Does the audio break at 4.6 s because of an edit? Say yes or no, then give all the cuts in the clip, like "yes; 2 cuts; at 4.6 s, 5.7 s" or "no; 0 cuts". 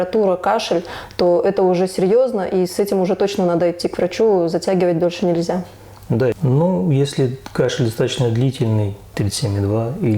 no; 2 cuts; at 6.4 s, 9.0 s